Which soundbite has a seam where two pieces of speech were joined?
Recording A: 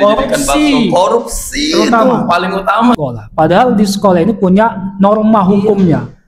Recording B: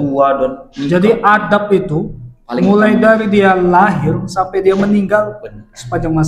A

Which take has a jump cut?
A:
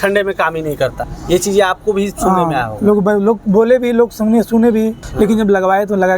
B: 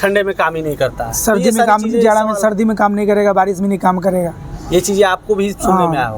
A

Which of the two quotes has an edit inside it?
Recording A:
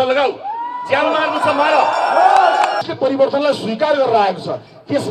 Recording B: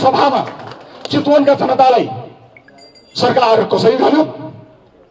A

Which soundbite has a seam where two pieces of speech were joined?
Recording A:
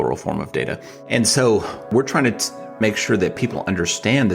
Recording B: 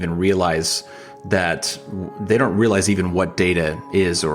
A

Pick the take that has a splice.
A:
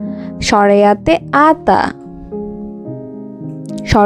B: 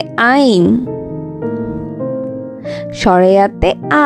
B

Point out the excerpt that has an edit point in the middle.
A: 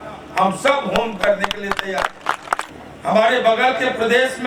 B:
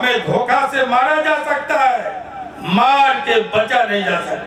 A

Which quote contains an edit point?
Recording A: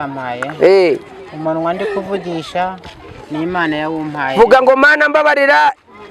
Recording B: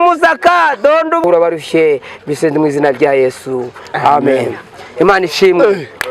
B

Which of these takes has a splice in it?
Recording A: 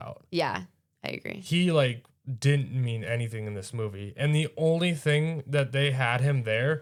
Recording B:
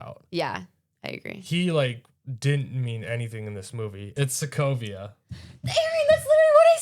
B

